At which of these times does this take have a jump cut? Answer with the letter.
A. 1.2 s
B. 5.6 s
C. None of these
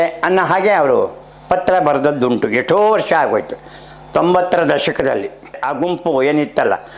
B